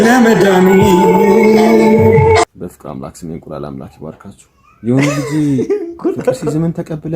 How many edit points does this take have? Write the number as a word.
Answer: one